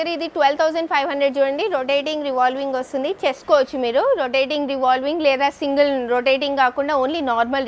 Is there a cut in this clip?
yes; 1 cut; at 3.4 s

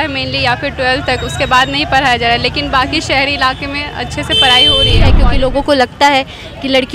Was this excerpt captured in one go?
no; 1 cut; at 5.2 s

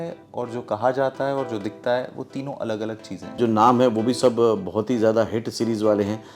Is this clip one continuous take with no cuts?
no; 1 cut; at 3.4 s

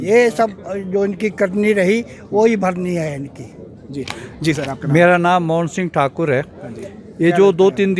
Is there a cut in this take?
no; 0 cuts

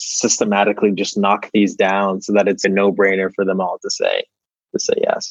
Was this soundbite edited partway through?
yes; 1 cut; at 2.6 s

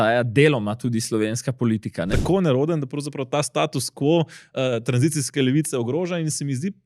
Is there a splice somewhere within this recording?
yes; 1 cut; at 2.1 s

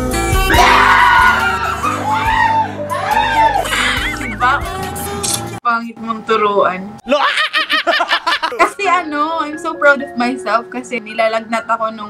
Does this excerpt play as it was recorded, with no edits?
no; 1 cut; at 8.5 s

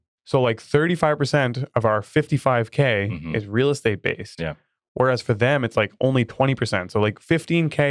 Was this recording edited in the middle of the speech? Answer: no; 0 cuts

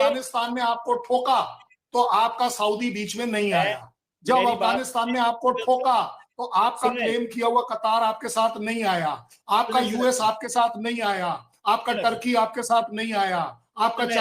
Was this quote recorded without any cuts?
yes; 0 cuts

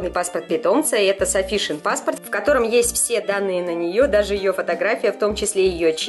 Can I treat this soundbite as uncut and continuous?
yes; 0 cuts

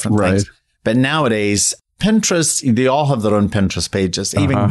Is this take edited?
no; 0 cuts

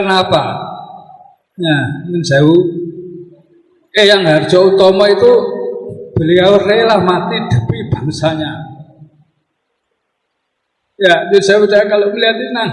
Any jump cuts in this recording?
no; 0 cuts

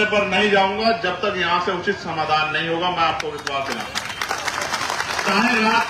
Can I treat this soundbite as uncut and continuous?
yes; 0 cuts

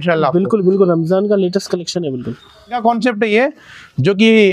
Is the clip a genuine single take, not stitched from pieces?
no; 1 cut; at 2.8 s

